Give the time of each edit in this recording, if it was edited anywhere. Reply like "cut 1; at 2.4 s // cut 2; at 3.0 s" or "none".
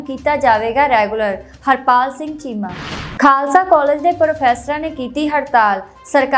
cut 1; at 3.0 s